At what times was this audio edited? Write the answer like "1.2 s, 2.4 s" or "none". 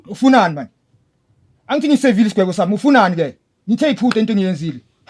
none